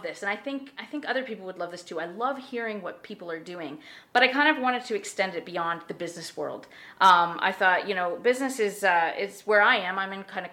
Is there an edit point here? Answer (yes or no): no